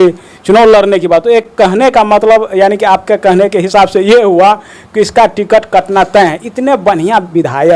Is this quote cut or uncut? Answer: uncut